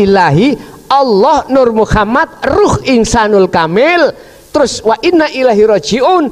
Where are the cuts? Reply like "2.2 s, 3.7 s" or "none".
none

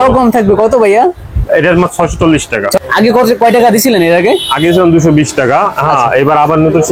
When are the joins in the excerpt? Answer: 2.7 s

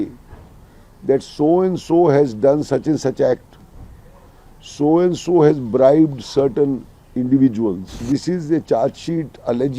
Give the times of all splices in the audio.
8.0 s

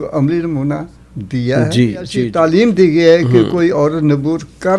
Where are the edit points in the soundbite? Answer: 2.2 s

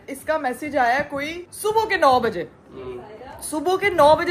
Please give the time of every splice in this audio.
none

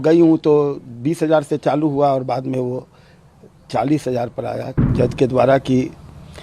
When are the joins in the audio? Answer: 4.8 s

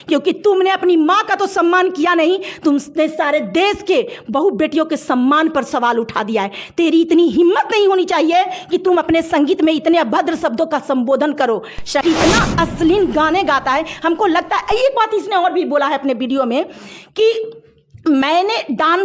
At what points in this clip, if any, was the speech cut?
12.0 s

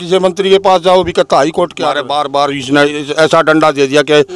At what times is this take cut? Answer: 2.0 s

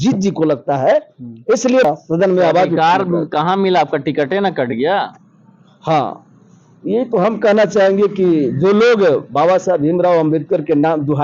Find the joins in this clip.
1.8 s

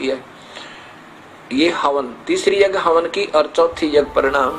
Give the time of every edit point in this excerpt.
none

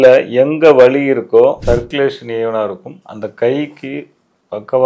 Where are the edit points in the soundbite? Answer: 1.6 s

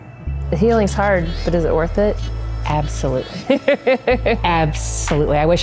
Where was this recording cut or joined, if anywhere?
none

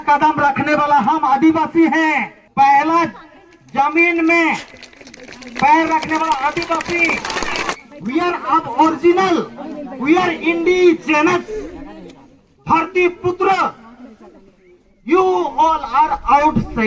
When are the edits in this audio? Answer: 2.4 s, 7.7 s

